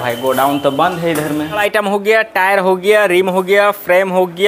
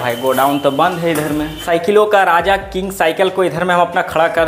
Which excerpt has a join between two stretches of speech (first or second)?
first